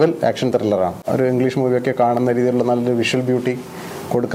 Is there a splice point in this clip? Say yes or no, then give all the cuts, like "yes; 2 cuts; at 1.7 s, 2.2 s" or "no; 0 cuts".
yes; 1 cut; at 1.0 s